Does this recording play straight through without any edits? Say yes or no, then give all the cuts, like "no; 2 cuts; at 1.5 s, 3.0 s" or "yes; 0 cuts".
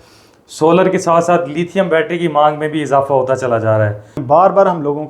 no; 1 cut; at 4.2 s